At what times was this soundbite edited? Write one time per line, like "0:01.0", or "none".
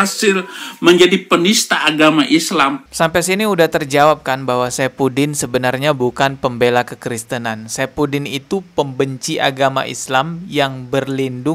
none